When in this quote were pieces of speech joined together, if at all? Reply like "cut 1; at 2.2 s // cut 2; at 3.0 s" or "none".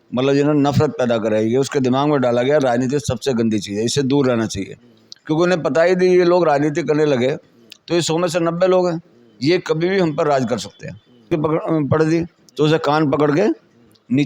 cut 1; at 11.3 s